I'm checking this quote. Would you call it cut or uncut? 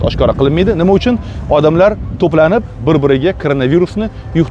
uncut